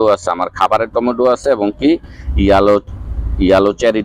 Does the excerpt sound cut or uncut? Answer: uncut